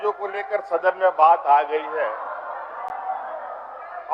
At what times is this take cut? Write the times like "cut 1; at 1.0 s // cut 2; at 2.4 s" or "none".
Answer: none